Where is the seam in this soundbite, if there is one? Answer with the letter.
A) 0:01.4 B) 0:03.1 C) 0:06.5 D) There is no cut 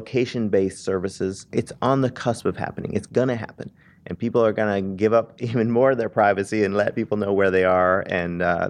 A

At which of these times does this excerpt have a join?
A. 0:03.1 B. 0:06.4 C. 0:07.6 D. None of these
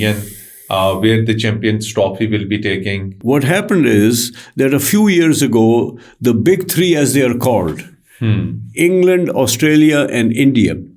A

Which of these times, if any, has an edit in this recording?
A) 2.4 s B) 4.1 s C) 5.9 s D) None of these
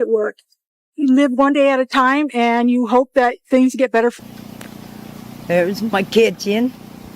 B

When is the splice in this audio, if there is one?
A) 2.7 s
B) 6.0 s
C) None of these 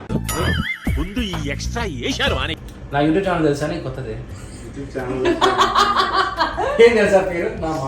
A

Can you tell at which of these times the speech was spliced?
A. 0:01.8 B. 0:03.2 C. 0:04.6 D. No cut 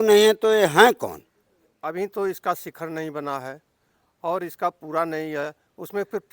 A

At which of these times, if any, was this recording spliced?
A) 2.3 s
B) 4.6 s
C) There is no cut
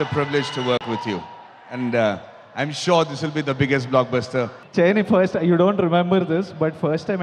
B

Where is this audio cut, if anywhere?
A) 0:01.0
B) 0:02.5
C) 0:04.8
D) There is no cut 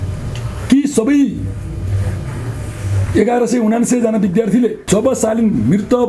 C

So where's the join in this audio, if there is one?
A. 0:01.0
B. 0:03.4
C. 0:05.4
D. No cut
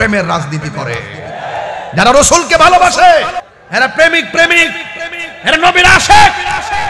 B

